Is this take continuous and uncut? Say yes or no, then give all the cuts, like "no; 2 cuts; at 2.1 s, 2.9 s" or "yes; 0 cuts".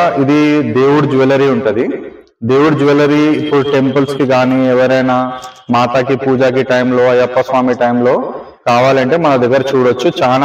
yes; 0 cuts